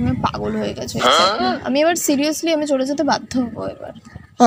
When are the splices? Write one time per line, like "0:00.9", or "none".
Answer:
none